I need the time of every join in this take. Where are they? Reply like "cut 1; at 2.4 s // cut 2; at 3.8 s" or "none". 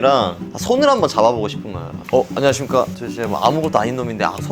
cut 1; at 2.0 s

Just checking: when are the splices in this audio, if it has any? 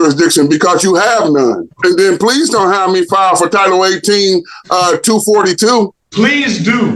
cut 1; at 1.7 s // cut 2; at 6.0 s

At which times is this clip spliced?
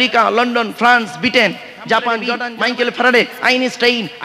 cut 1; at 2.4 s

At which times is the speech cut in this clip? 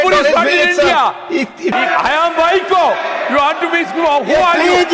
cut 1; at 1.7 s

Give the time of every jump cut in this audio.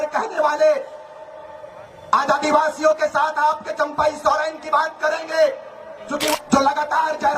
cut 1; at 6.3 s

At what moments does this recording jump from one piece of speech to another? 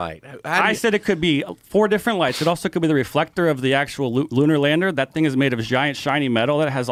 none

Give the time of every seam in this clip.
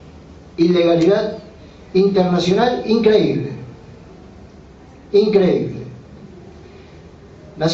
none

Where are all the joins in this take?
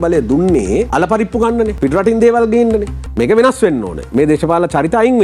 cut 1; at 0.9 s // cut 2; at 1.7 s // cut 3; at 3.0 s

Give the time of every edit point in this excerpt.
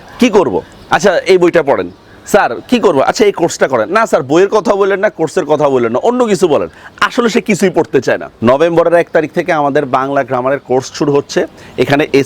cut 1; at 8.4 s

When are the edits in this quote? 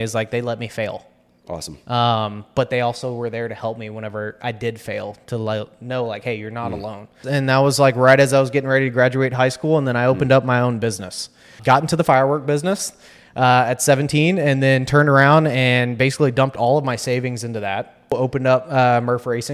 cut 1; at 7.2 s // cut 2; at 11.5 s // cut 3; at 18.1 s

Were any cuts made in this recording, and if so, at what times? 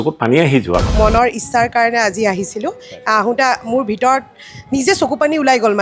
cut 1; at 0.9 s

